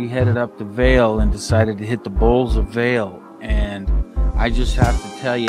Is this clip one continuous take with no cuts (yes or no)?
yes